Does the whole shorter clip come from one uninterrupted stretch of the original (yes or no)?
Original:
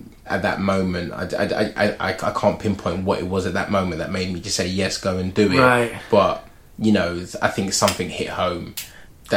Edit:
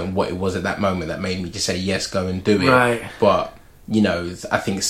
yes